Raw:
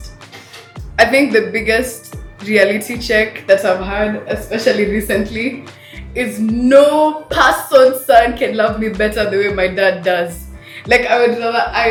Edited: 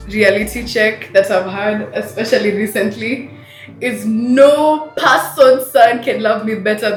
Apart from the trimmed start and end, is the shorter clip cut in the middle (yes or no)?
no